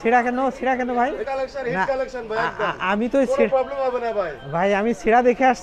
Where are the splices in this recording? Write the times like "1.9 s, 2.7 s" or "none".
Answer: 1.2 s